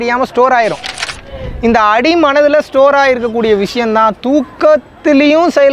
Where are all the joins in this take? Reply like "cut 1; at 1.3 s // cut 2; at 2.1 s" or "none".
cut 1; at 1.1 s